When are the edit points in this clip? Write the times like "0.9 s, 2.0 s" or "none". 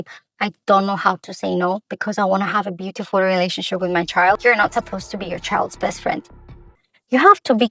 4.4 s, 6.8 s